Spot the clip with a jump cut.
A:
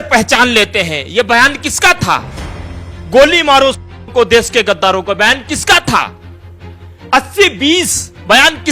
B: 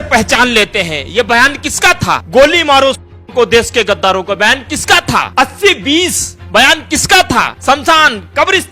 B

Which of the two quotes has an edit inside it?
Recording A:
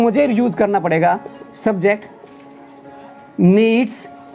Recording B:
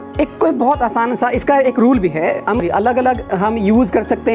B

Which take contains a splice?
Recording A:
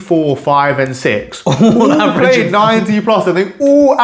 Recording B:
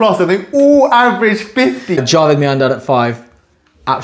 B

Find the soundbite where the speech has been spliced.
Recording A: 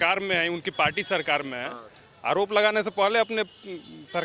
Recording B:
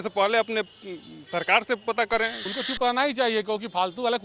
B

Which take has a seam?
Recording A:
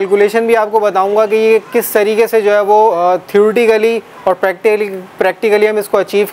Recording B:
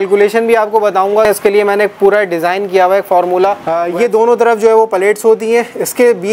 B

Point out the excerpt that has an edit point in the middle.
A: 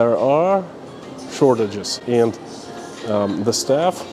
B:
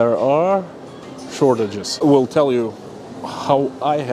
B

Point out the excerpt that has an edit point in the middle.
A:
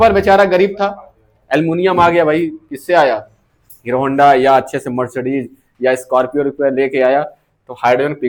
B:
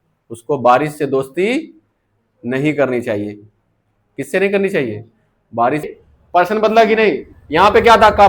B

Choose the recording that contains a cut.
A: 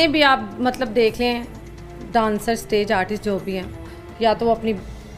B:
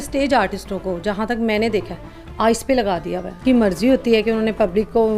B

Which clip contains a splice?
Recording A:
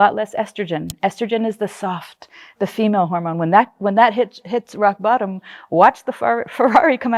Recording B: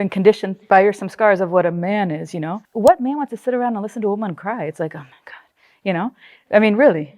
B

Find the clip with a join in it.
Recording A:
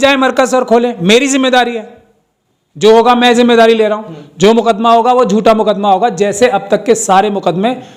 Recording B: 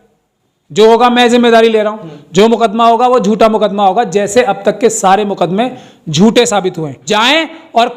B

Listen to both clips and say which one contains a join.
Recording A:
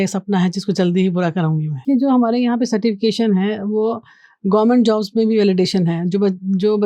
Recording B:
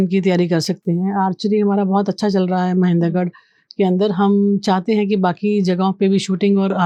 A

